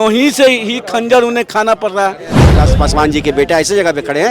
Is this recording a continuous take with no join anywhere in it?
no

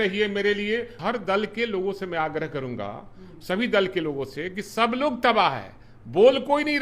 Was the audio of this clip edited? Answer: yes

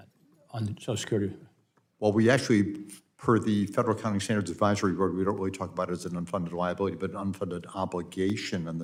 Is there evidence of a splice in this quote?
no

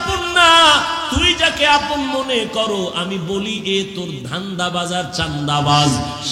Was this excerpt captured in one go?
yes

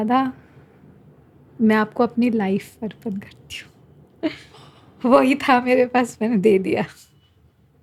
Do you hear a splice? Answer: no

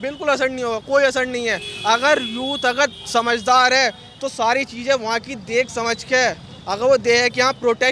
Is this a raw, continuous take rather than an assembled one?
yes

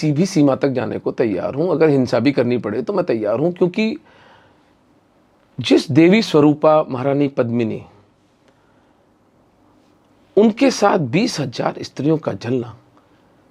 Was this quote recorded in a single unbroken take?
yes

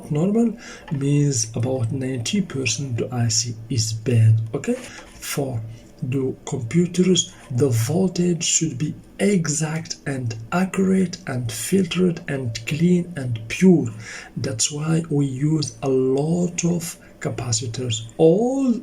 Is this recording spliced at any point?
yes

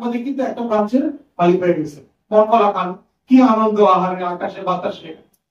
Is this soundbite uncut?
yes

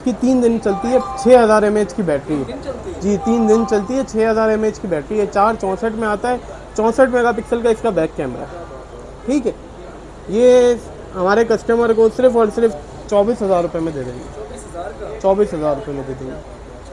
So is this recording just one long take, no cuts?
yes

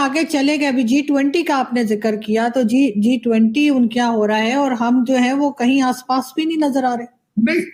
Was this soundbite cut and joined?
no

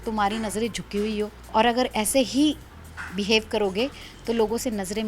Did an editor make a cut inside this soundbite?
yes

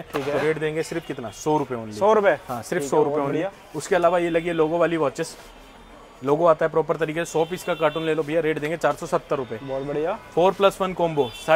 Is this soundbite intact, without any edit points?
yes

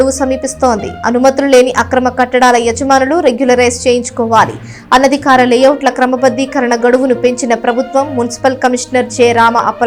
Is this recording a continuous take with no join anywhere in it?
yes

